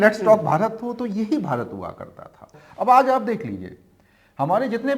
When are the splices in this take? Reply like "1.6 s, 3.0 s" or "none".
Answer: 2.6 s

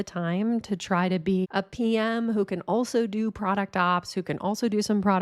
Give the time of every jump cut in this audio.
1.5 s

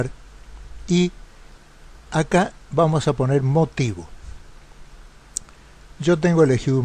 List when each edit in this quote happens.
2.1 s

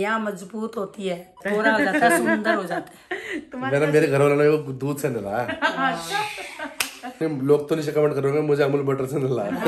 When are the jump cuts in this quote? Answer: 1.3 s, 7.2 s

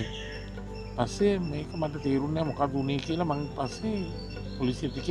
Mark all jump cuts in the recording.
none

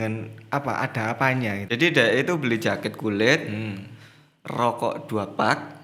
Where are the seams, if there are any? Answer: 1.7 s

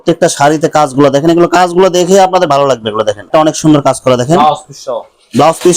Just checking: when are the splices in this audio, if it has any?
3.3 s

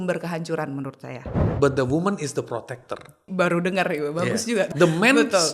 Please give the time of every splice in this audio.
1.4 s, 3.2 s, 4.7 s

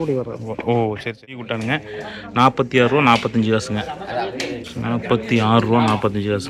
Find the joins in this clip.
1.5 s

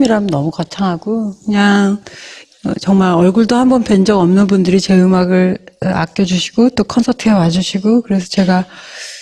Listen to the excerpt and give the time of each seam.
6.3 s

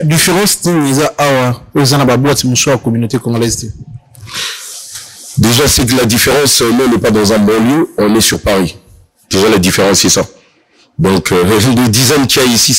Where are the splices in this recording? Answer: none

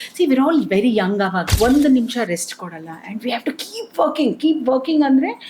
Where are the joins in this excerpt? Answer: 1.4 s

